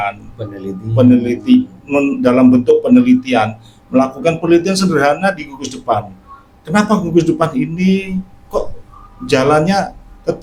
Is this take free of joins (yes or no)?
yes